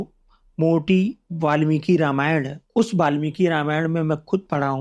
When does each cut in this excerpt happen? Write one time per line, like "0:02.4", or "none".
0:02.6